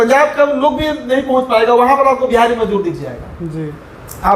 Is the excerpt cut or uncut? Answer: uncut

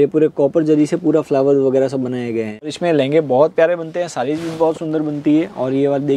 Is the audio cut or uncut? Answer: cut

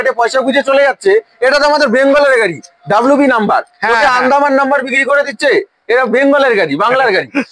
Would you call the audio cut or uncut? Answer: uncut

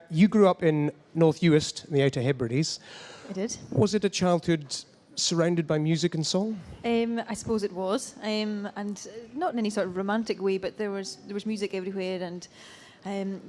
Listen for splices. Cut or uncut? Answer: uncut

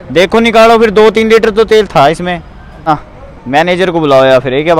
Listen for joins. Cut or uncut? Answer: cut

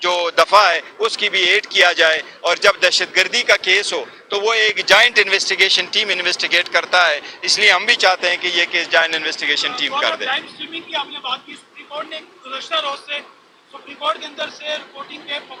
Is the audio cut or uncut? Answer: uncut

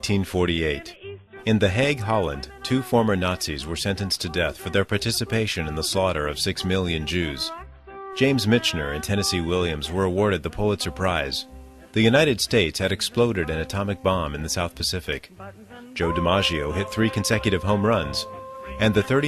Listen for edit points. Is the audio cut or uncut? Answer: cut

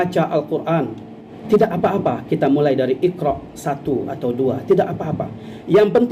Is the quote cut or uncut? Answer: uncut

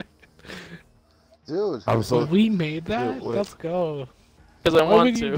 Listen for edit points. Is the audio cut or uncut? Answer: cut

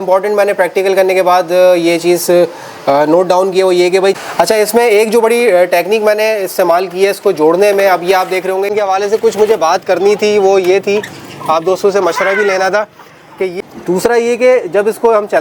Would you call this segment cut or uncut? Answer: cut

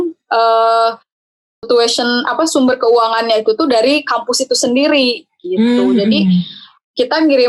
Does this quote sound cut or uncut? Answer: uncut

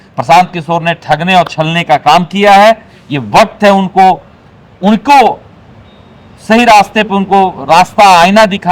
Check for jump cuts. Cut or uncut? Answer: uncut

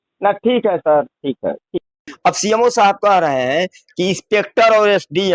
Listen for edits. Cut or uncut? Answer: cut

